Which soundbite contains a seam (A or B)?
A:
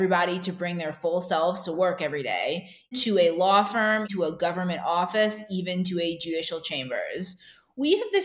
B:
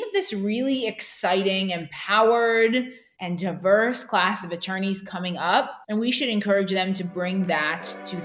A